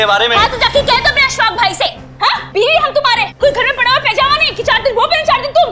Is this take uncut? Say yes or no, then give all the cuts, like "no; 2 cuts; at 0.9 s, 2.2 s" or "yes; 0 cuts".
no; 1 cut; at 3.3 s